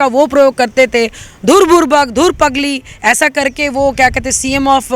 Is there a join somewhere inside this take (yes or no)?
no